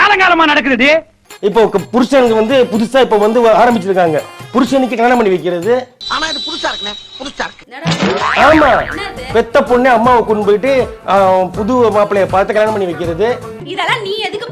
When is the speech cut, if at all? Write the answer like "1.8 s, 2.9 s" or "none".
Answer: 1.2 s, 13.6 s